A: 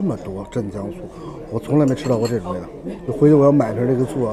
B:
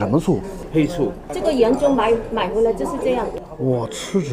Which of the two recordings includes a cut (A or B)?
B